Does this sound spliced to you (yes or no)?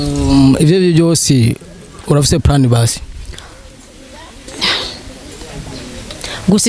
no